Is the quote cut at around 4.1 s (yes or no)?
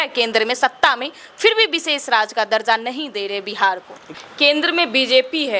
yes